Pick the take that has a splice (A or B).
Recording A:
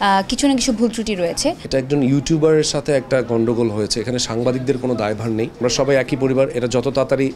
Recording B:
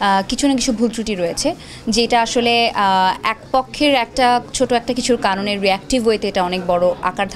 A